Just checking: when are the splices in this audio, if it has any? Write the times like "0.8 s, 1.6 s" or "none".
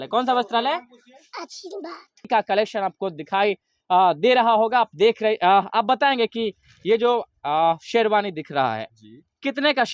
2.3 s